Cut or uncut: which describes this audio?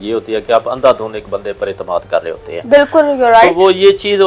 uncut